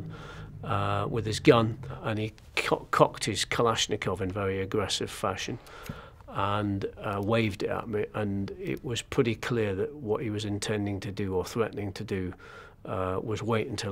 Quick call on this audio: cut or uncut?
cut